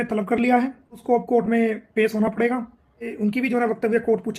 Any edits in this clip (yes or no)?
yes